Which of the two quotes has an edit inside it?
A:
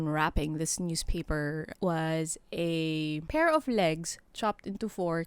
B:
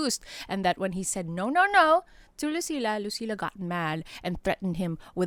A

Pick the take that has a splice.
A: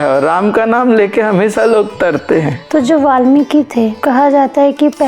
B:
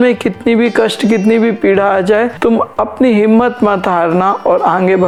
A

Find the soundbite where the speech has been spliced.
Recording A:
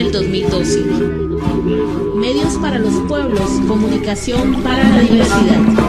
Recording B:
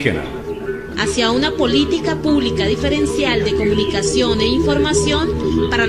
A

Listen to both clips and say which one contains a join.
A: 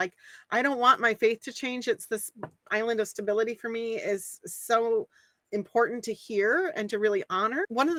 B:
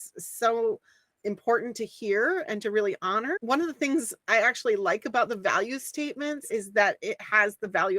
B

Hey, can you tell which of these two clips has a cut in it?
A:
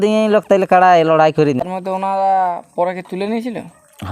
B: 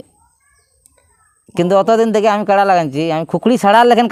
A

